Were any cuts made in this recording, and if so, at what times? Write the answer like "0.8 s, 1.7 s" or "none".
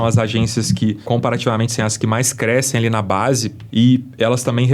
1.0 s, 3.6 s